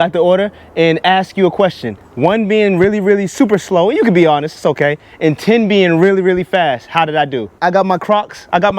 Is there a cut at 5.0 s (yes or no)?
no